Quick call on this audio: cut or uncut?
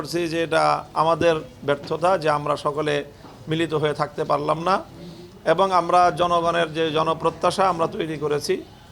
uncut